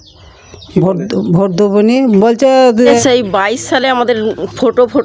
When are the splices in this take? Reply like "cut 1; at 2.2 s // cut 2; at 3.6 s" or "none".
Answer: cut 1; at 2.8 s